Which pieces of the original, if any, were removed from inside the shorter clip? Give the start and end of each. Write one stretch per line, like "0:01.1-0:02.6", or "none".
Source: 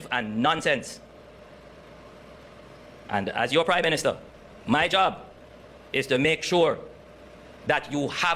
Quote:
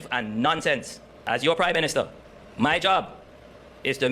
0:01.2-0:03.3